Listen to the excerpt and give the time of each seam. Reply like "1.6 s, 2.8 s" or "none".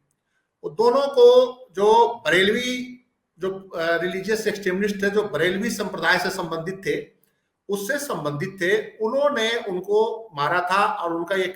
none